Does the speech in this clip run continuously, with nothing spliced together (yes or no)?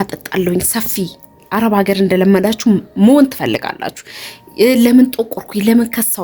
yes